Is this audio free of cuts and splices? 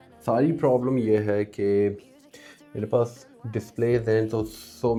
yes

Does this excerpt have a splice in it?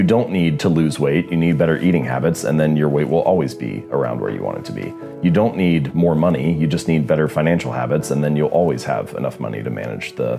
no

